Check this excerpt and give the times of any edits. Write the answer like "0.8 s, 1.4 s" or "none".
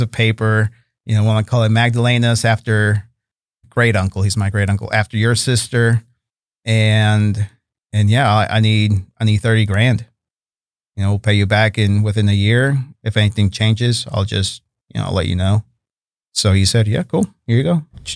3.5 s

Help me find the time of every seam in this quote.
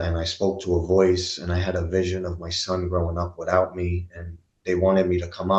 none

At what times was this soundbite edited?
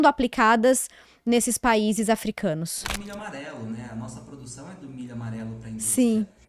2.9 s

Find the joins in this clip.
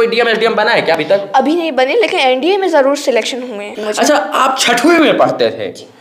3.8 s

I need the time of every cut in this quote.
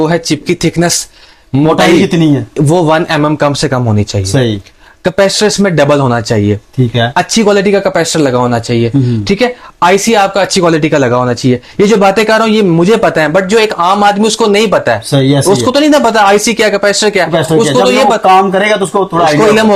none

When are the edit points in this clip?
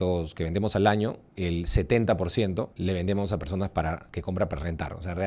1.3 s, 2.7 s, 4.1 s

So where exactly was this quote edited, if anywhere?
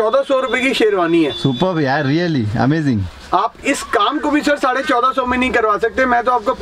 none

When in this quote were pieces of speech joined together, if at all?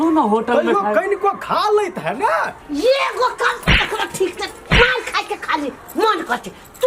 2.6 s

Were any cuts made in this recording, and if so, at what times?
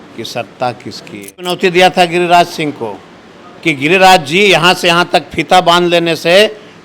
1.5 s

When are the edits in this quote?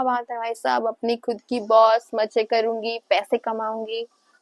none

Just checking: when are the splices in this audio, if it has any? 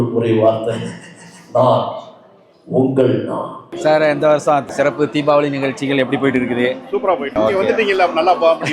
3.6 s, 4.7 s, 7.4 s

